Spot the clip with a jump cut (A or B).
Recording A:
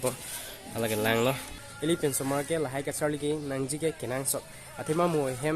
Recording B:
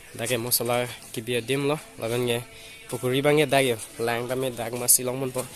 A